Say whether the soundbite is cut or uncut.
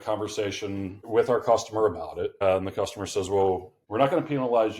cut